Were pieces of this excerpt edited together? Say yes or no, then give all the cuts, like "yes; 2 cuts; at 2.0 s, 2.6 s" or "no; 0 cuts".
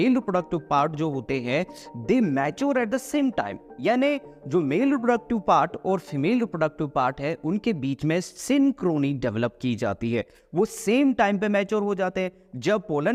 no; 0 cuts